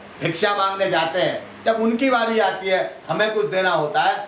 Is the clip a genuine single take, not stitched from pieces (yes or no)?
yes